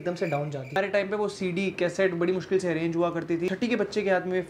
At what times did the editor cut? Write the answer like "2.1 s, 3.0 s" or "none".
0.7 s, 3.5 s